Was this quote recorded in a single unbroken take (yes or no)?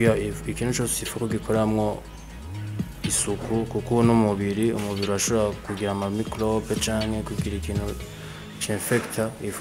yes